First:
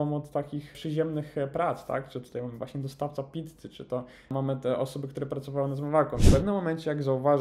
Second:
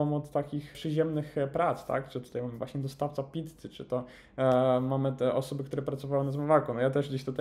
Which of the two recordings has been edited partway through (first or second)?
first